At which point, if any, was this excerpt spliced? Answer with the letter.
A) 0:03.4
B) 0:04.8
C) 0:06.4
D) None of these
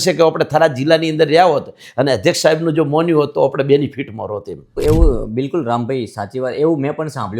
B